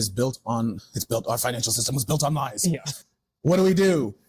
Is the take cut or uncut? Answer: cut